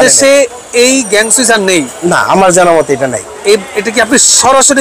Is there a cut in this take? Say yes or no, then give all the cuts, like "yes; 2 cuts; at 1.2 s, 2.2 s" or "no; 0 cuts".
no; 0 cuts